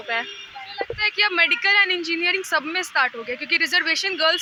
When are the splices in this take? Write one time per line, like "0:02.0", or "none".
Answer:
none